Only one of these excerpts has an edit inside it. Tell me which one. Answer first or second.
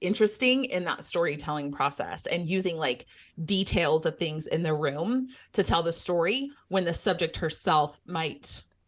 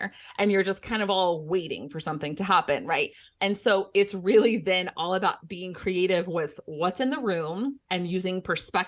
second